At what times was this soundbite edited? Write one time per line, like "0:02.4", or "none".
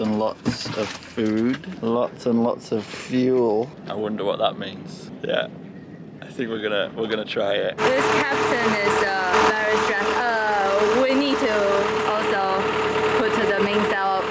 0:01.7
0:03.8
0:05.1
0:07.8
0:09.3